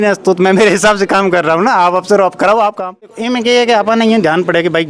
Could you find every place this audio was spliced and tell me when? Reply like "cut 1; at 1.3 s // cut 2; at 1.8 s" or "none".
cut 1; at 3.2 s